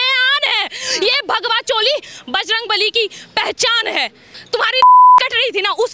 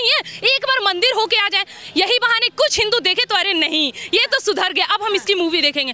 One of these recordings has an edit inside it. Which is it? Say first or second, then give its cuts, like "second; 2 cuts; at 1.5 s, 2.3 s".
first; 1 cut; at 4.3 s